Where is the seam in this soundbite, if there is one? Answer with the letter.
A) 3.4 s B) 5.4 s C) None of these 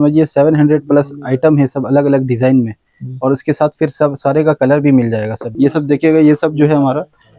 B